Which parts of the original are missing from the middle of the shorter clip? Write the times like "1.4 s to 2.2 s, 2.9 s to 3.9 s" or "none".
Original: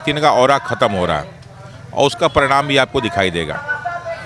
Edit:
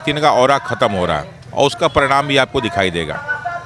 1.3 s to 1.8 s